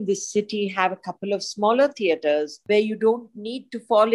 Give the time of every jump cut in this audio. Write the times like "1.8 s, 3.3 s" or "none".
2.6 s